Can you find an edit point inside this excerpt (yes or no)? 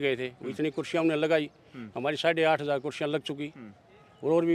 no